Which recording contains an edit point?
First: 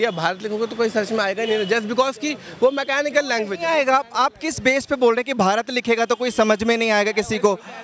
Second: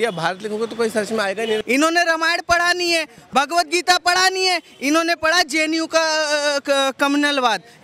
second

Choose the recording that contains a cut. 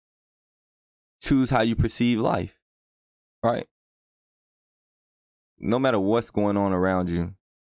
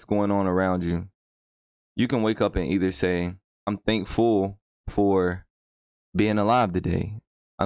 second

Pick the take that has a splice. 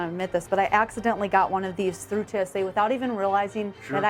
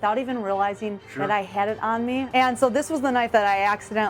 second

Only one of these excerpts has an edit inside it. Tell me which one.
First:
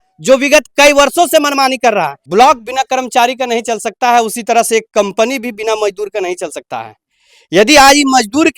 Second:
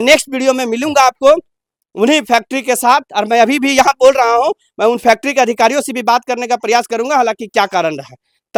first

